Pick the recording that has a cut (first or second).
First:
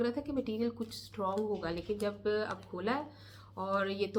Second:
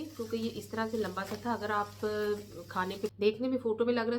second